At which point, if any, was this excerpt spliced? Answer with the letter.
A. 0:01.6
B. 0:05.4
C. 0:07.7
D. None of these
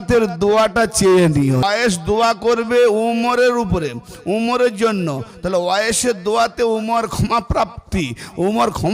A